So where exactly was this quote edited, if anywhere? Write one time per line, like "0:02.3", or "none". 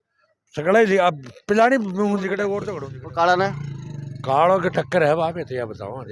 0:02.7